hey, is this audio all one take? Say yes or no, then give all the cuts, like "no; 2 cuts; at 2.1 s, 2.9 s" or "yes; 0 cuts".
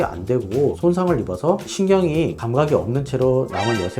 no; 2 cuts; at 0.8 s, 1.7 s